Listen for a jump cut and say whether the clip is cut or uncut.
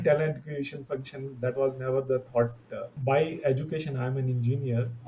cut